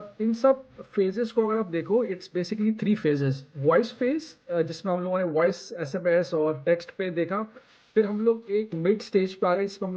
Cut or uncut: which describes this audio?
cut